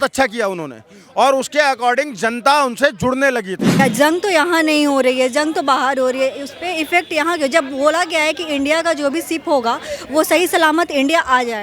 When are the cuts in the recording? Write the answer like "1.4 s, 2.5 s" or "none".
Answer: 3.8 s